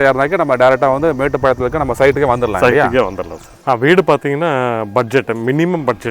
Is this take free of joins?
no; 1 cut; at 3.5 s

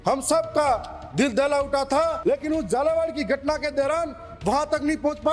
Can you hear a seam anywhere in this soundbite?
yes; 1 cut; at 2.2 s

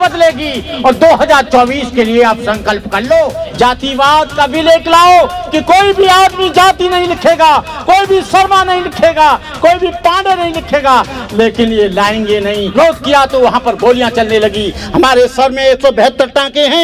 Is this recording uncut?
no; 2 cuts; at 3.4 s, 12.7 s

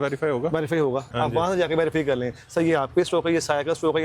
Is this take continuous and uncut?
no; 1 cut; at 1.1 s

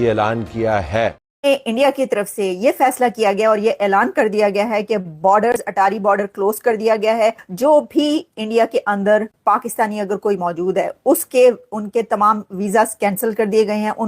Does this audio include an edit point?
yes; 1 cut; at 1.2 s

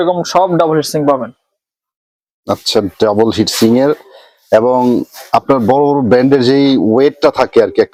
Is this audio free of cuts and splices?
yes; 0 cuts

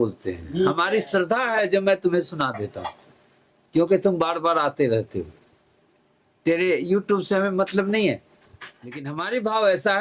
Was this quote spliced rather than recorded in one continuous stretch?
no; 0 cuts

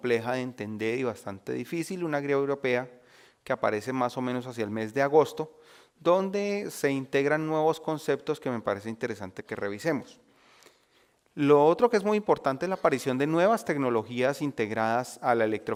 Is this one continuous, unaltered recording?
yes; 0 cuts

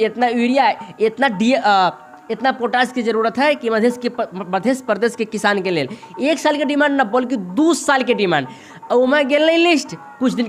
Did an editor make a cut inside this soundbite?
no; 0 cuts

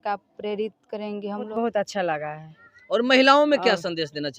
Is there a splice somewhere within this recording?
yes; 1 cut; at 1.5 s

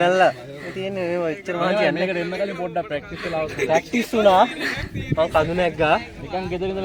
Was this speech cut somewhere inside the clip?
no; 0 cuts

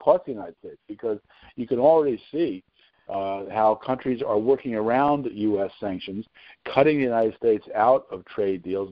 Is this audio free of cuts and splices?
yes; 0 cuts

